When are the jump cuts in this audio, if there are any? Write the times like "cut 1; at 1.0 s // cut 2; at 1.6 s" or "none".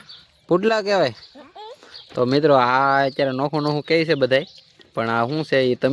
none